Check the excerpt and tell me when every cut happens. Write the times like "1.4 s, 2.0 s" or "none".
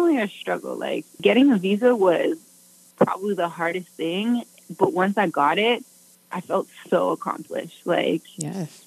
1.2 s